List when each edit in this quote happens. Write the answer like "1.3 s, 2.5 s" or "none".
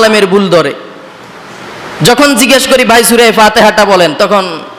none